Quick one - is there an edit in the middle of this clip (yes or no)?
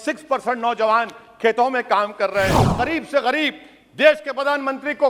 yes